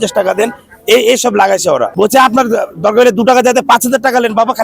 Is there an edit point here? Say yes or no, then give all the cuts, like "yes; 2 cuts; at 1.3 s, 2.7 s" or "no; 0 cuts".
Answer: yes; 1 cut; at 1.9 s